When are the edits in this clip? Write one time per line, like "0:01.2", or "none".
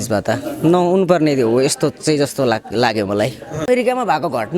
0:03.7